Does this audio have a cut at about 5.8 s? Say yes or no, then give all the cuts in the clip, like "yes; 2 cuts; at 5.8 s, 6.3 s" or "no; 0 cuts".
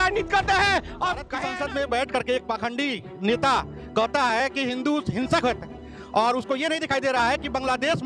no; 1 cut; at 1.4 s